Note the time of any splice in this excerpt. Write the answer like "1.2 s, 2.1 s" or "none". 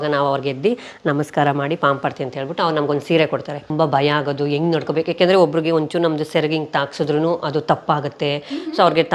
3.7 s